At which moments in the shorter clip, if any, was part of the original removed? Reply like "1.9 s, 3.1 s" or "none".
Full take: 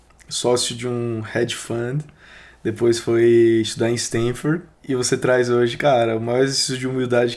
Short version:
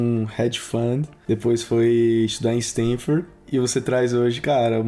1.1 s